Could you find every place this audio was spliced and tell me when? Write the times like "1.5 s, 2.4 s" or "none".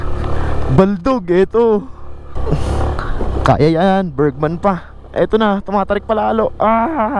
2.4 s